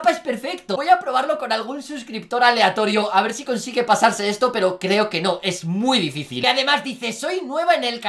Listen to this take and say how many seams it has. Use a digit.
1